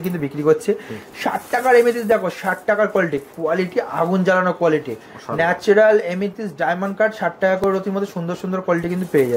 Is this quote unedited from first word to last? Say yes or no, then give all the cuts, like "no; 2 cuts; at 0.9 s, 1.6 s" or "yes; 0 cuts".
yes; 0 cuts